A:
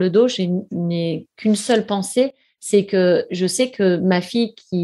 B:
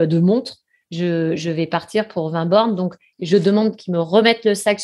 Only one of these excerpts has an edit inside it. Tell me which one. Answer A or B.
B